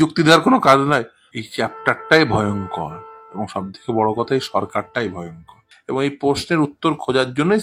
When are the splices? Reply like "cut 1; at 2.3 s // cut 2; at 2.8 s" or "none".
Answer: cut 1; at 1.2 s // cut 2; at 5.7 s